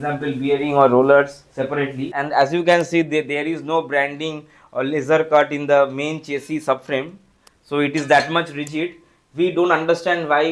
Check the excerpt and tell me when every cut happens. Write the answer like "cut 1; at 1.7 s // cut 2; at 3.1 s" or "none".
cut 1; at 2.1 s